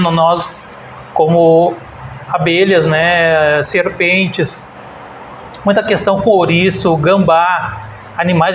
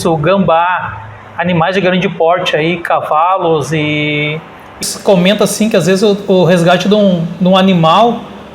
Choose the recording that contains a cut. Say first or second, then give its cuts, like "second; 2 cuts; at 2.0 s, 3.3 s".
second; 1 cut; at 4.8 s